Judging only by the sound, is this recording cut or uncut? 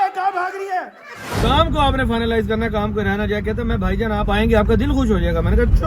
cut